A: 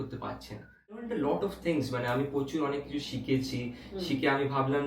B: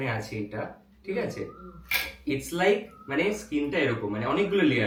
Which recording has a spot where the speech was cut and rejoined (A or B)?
A